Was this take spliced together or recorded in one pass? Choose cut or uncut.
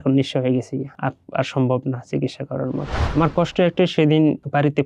cut